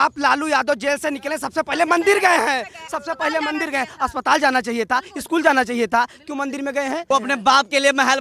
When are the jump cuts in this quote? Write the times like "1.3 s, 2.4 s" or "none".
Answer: 7.0 s